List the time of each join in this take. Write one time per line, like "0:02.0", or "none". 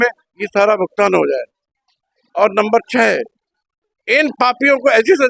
none